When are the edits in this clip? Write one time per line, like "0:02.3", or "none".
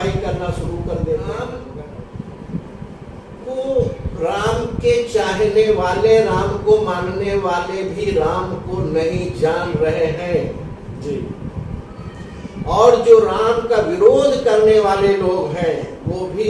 0:01.6